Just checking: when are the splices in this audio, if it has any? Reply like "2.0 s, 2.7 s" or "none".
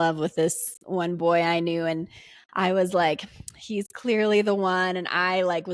none